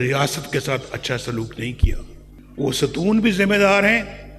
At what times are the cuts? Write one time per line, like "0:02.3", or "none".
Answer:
none